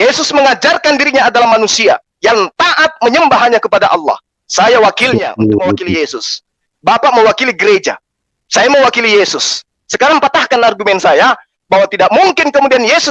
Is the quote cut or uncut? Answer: uncut